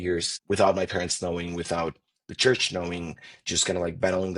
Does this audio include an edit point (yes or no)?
no